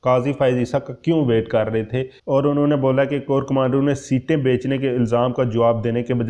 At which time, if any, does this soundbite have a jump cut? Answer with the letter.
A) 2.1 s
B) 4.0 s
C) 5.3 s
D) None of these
A